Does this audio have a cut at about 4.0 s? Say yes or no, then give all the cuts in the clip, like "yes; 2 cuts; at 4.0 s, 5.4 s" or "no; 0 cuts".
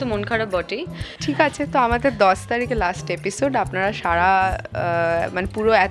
no; 1 cut; at 1.1 s